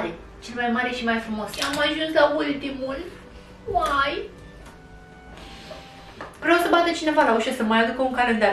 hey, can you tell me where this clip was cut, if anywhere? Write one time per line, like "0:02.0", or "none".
0:01.6